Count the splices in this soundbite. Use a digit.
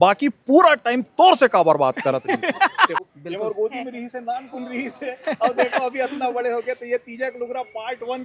1